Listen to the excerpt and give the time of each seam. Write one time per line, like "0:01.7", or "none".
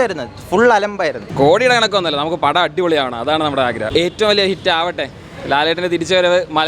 0:01.3
0:03.8